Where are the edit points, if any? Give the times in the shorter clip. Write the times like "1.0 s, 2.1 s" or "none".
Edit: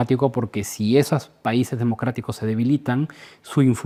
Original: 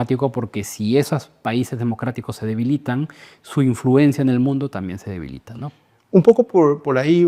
none

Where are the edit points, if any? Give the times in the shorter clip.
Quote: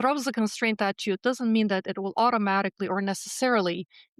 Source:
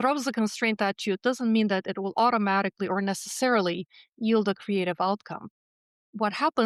none

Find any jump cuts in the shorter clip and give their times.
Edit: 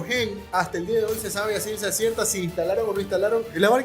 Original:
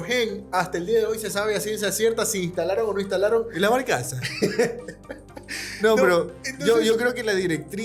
none

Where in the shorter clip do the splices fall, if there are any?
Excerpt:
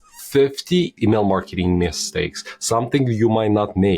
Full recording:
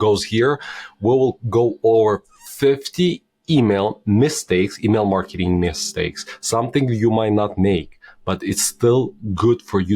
0.9 s

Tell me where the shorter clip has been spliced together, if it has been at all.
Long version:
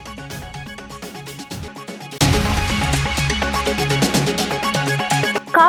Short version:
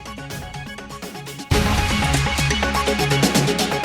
1.5 s

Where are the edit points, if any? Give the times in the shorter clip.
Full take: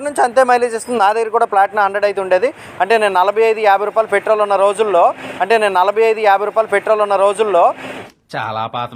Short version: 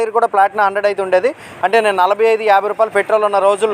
1.5 s

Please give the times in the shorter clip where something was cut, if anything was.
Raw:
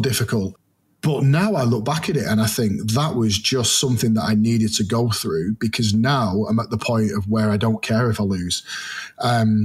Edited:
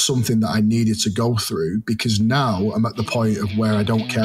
none

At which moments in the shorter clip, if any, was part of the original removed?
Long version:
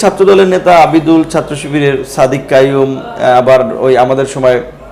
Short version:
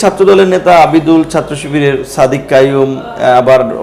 none

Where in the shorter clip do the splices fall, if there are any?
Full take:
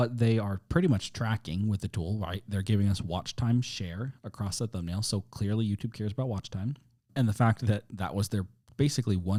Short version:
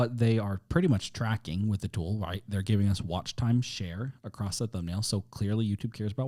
none

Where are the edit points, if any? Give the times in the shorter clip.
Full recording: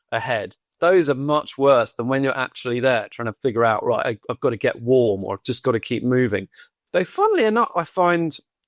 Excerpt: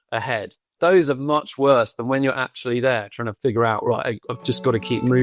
4.3 s

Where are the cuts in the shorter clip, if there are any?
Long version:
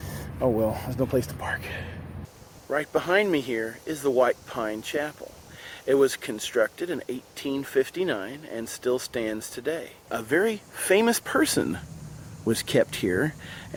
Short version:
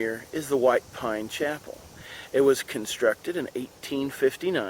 none

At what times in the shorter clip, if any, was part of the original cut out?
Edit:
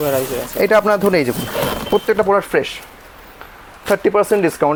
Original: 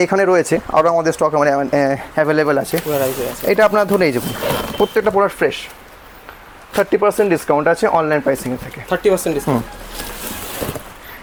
none

